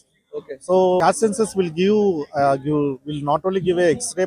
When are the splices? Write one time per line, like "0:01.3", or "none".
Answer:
0:01.0